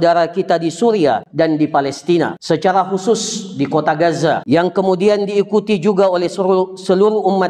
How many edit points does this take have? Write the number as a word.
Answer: three